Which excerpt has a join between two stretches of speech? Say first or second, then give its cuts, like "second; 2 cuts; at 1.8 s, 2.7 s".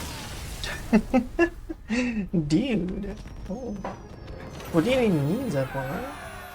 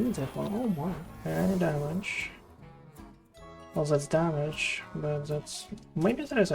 second; 1 cut; at 1.1 s